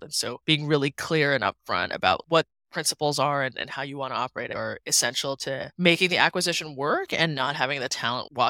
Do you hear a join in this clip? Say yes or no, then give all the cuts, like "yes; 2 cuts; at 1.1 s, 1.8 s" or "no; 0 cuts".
no; 0 cuts